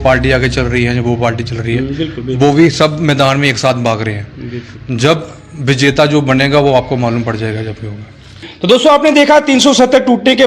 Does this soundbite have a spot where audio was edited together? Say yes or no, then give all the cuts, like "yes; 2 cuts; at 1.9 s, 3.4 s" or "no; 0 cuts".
yes; 1 cut; at 8.5 s